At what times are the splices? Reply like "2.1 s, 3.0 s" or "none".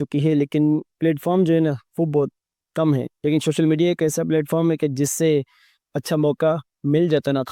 none